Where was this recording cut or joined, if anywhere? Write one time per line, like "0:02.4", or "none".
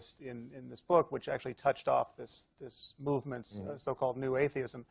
0:03.0